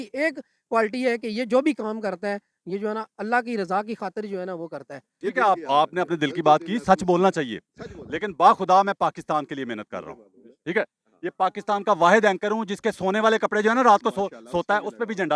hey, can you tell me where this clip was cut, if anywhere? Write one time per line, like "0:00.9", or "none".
0:05.3